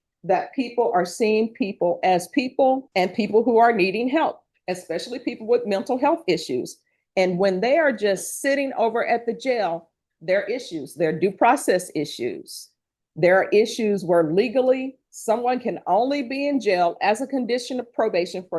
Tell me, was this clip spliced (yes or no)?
yes